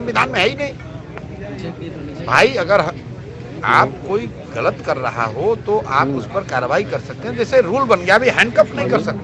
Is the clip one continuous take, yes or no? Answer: yes